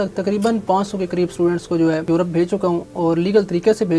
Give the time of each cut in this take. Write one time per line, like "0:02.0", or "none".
0:02.1